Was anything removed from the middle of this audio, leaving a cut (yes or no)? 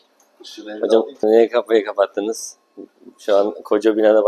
yes